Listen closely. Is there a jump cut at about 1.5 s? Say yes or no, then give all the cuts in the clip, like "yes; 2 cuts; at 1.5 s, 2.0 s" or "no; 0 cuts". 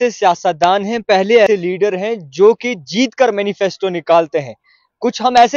yes; 1 cut; at 1.5 s